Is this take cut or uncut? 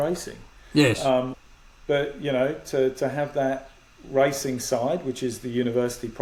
uncut